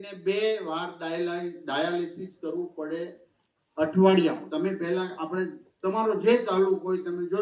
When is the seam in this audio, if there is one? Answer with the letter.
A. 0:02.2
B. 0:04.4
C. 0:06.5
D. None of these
B